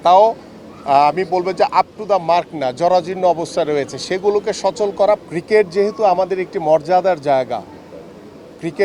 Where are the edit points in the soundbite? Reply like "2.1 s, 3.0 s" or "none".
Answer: 5.2 s

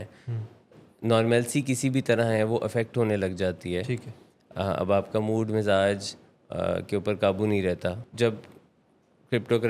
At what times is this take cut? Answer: 8.0 s

